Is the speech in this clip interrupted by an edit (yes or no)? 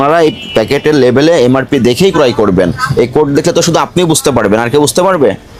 no